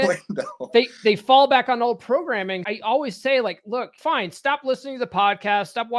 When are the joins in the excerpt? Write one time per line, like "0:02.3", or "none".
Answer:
0:02.6
0:03.9